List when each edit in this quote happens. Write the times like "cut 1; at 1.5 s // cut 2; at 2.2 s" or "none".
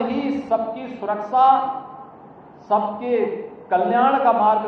none